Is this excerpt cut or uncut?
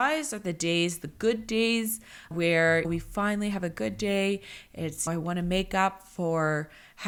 uncut